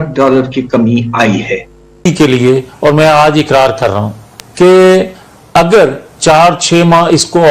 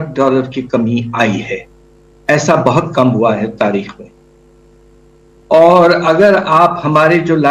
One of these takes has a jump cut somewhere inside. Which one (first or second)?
first